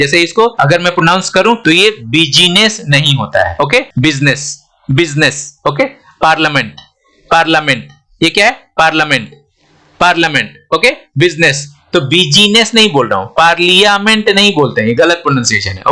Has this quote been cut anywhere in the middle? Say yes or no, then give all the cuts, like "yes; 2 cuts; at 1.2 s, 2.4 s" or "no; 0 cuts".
no; 0 cuts